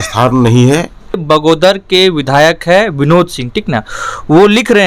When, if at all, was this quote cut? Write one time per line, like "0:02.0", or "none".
0:01.2